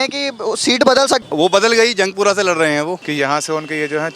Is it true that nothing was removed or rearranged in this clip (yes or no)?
no